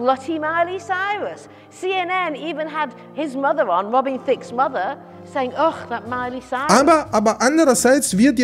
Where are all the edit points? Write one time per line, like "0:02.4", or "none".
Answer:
none